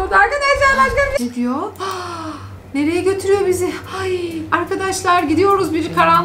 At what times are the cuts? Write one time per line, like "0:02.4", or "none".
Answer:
0:01.2